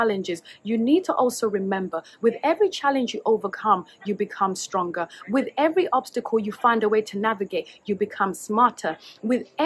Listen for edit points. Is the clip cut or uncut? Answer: uncut